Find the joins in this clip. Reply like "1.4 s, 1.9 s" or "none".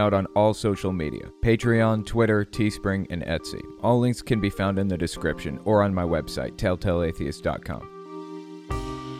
8.0 s